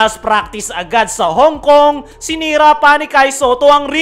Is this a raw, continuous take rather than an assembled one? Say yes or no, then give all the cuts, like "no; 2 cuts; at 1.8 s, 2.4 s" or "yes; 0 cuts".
yes; 0 cuts